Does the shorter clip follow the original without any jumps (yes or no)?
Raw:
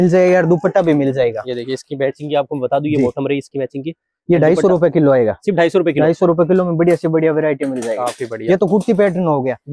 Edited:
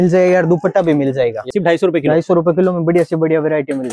no